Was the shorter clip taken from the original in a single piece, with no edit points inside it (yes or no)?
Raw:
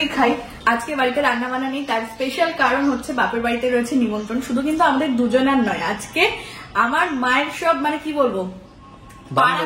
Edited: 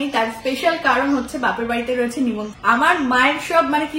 no